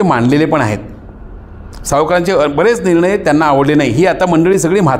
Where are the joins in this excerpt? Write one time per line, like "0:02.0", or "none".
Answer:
none